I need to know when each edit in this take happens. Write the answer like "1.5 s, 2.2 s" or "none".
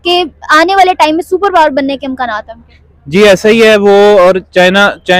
none